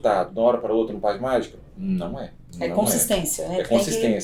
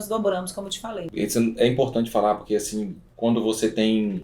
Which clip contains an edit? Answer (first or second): second